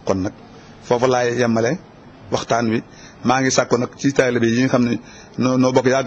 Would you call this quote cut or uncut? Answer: cut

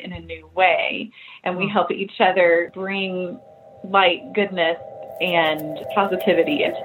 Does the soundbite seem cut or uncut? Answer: cut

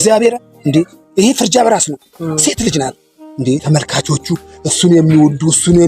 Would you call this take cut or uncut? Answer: cut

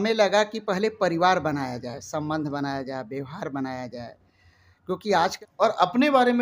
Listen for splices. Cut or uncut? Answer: cut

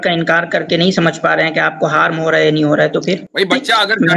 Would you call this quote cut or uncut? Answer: cut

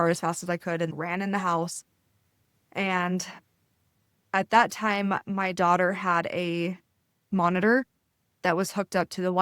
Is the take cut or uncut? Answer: cut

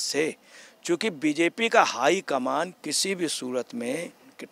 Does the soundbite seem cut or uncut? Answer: uncut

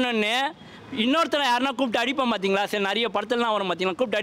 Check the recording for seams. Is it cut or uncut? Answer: uncut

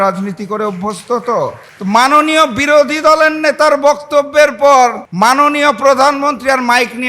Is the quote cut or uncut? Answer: cut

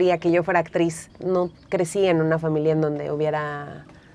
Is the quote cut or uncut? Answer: cut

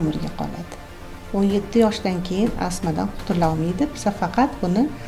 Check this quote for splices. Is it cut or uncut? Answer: uncut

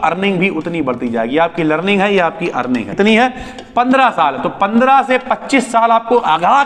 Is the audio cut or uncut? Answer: cut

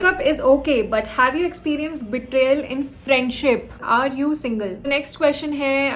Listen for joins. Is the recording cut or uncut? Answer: cut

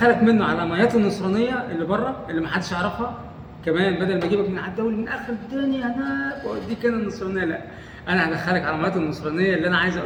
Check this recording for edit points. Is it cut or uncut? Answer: uncut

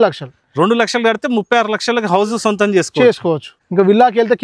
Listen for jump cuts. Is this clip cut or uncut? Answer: cut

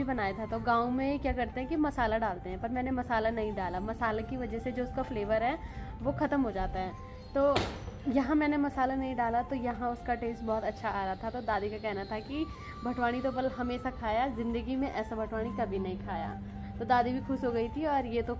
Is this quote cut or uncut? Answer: uncut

